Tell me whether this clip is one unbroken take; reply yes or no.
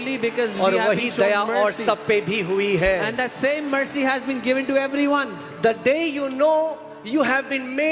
yes